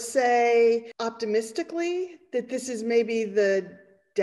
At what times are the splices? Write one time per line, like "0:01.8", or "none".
0:00.9